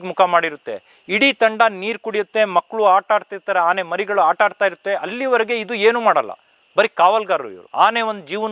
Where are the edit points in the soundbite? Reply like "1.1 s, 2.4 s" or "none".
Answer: none